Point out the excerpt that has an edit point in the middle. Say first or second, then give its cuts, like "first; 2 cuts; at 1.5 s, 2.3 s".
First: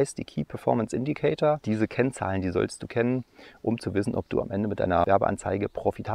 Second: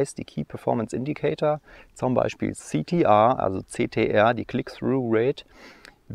first; 2 cuts; at 1.6 s, 5.0 s